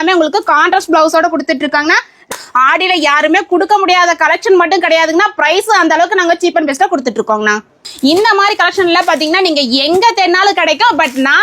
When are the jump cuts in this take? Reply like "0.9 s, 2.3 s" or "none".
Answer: 2.3 s, 7.8 s